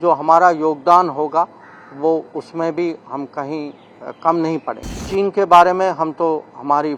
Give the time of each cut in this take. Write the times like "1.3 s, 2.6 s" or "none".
4.9 s